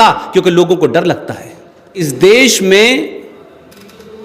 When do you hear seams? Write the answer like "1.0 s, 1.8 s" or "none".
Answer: 2.1 s